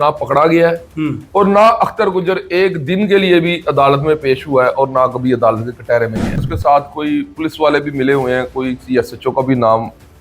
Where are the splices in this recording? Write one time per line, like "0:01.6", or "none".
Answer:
0:06.3

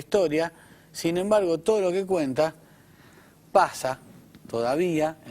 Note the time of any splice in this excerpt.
none

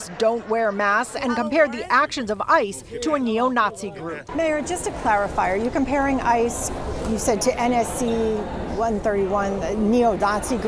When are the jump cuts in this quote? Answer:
0:04.2

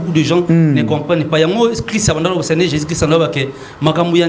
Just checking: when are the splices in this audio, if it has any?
none

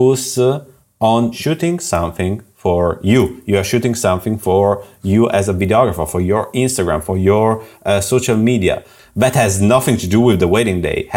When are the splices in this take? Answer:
0:01.3
0:09.0

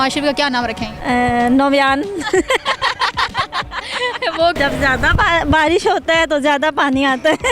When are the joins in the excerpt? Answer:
0:00.9
0:04.6

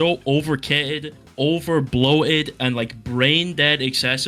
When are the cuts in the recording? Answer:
none

